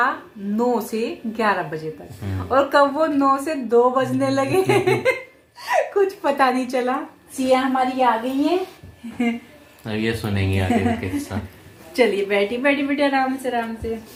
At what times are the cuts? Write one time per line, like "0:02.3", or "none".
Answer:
none